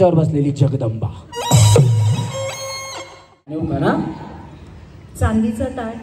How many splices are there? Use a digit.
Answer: 1